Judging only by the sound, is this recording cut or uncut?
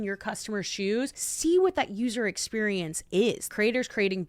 cut